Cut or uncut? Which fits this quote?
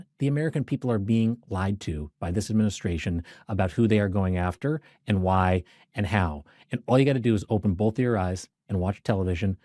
uncut